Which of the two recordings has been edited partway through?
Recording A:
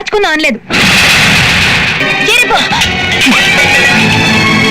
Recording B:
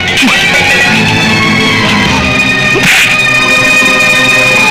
A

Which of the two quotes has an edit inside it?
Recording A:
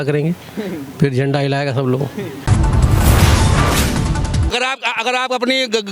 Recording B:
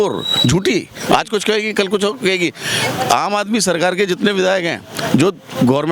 A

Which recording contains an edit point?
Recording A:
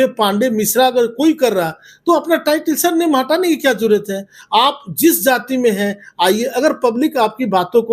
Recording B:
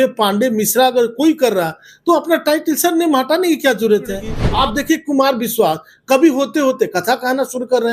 B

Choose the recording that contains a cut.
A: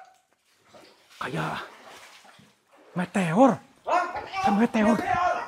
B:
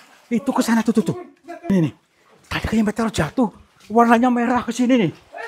B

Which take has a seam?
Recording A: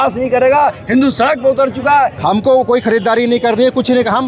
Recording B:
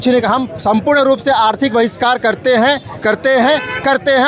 A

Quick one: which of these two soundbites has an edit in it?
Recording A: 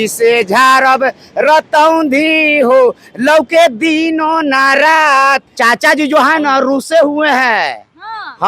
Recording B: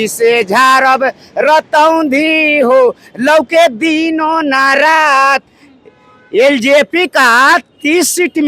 A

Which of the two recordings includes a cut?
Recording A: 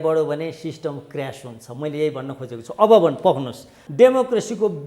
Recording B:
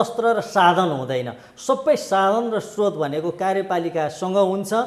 A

